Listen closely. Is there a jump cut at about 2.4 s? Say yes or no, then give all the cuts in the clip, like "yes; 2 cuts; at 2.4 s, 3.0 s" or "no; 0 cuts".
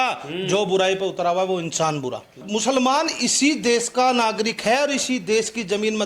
yes; 1 cut; at 2.4 s